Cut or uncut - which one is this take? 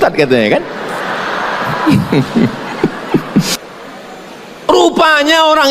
cut